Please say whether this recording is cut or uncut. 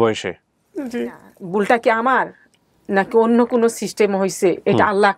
cut